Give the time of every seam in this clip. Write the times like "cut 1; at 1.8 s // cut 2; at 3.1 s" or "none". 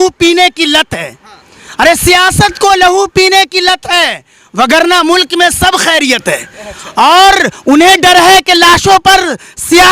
none